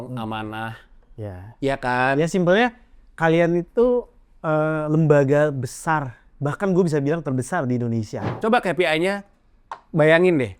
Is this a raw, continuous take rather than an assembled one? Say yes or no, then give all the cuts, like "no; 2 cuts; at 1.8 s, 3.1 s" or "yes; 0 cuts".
no; 1 cut; at 8.3 s